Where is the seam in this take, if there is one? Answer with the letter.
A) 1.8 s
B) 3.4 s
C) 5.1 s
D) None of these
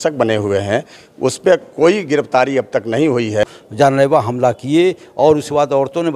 B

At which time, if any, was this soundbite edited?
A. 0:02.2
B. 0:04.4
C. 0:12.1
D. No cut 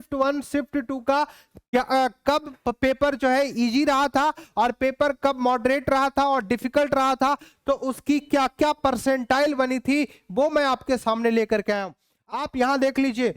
C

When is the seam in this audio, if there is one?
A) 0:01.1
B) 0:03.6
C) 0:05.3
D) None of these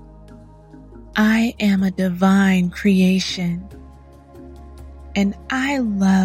A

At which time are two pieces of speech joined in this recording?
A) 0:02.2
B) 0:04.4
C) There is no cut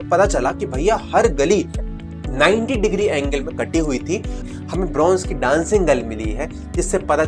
B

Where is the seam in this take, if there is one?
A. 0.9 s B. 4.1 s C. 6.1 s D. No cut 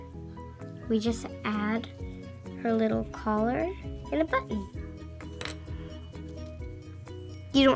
D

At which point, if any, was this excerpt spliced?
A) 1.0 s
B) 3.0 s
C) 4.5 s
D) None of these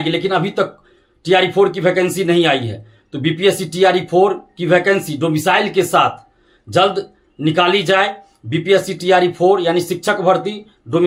D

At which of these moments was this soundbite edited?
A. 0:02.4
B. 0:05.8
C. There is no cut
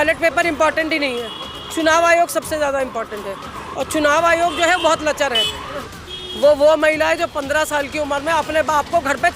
B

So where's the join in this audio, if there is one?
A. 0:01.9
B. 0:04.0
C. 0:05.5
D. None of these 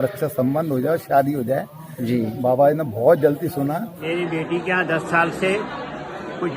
B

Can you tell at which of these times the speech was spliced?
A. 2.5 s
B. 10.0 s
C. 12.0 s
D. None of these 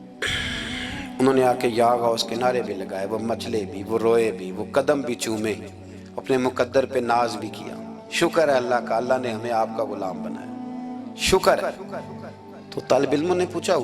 D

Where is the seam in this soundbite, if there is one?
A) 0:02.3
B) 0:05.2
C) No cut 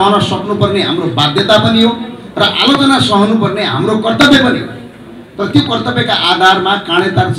C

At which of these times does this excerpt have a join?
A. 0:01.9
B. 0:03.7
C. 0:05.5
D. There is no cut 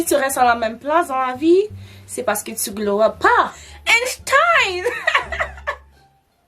B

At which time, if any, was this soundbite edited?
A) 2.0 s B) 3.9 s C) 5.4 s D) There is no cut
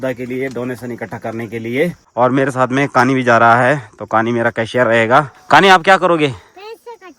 D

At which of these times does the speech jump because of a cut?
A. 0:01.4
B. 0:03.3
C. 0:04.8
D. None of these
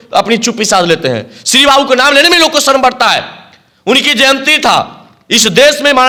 D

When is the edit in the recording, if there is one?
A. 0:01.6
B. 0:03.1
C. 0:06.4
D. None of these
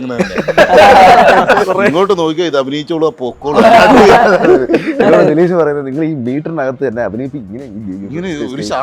A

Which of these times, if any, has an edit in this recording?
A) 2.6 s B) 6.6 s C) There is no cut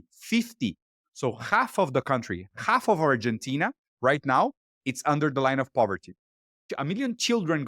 B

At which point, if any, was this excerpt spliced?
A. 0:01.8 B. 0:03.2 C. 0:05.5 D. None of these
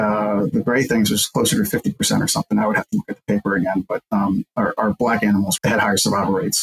C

